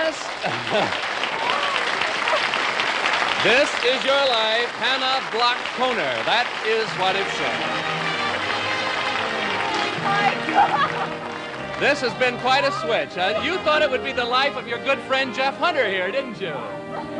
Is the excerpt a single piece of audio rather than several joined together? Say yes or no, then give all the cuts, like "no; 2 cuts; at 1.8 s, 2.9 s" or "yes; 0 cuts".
no; 1 cut; at 12.6 s